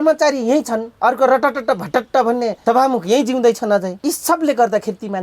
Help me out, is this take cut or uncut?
cut